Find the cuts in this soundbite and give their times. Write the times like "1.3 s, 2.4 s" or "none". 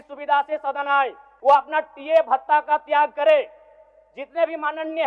1.3 s